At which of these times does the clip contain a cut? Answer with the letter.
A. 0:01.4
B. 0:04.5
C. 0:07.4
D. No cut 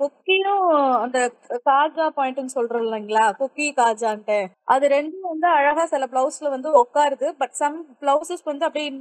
B